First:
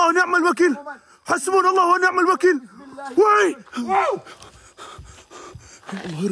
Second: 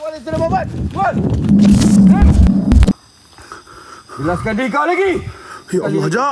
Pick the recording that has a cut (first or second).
second